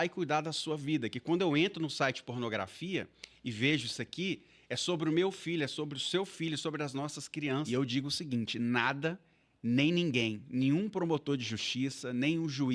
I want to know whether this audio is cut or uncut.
cut